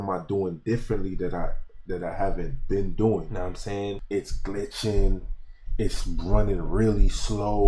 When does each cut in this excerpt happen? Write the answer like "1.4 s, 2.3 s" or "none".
4.0 s